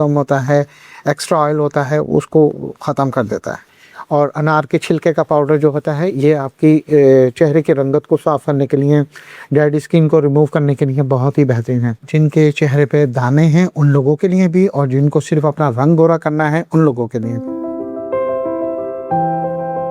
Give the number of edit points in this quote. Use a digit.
3